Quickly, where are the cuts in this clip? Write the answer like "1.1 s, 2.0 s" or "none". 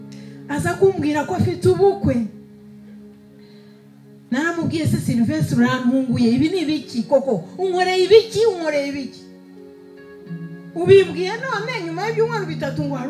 none